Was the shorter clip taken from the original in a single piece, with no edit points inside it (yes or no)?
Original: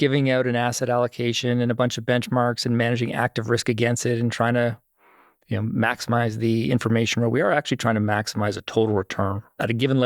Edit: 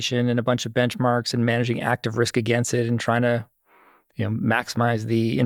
yes